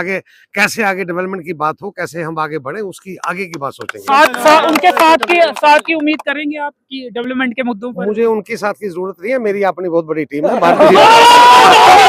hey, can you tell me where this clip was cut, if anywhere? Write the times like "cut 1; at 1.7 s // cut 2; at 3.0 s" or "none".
none